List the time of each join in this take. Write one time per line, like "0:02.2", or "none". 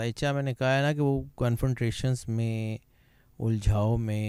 none